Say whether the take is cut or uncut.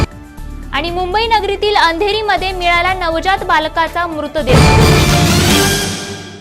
cut